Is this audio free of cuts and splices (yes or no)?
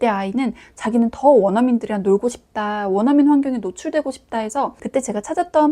no